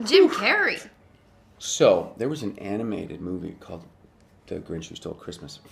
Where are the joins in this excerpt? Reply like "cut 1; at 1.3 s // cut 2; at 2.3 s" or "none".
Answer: none